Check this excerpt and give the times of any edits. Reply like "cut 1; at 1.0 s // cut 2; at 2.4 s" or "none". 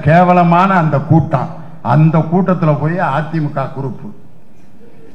none